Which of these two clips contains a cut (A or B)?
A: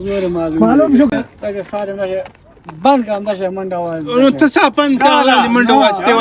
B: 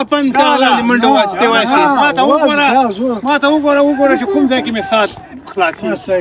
A